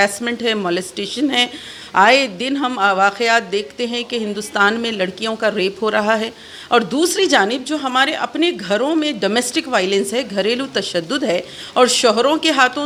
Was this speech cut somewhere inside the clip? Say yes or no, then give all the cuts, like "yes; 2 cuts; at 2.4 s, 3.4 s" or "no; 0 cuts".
no; 0 cuts